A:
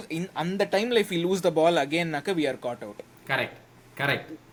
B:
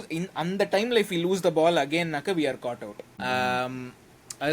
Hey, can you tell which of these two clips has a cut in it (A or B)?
B